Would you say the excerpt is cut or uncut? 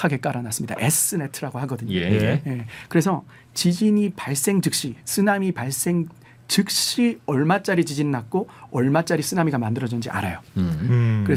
uncut